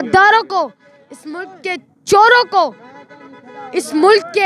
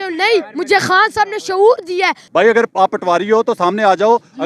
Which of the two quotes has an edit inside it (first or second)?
second